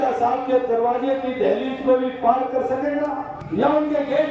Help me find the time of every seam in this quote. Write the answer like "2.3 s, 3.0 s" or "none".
3.4 s